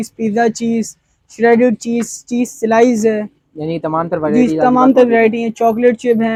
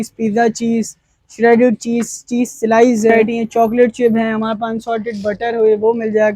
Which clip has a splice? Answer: second; 1 cut; at 3.1 s

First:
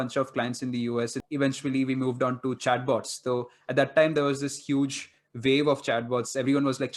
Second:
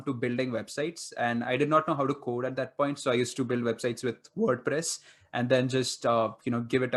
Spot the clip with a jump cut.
first; 1 cut; at 1.2 s

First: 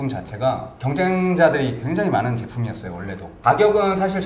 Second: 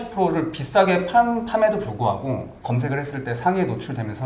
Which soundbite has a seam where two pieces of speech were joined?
first; 1 cut; at 3.2 s

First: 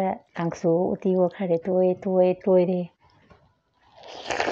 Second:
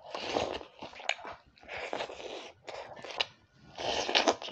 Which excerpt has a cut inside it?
second; 2 cuts; at 1.0 s, 3.1 s

